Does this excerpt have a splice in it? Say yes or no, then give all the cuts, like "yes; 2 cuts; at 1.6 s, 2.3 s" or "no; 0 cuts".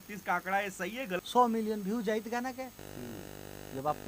yes; 1 cut; at 1.2 s